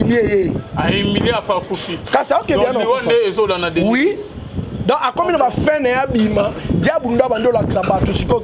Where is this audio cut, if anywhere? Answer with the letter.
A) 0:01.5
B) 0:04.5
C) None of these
C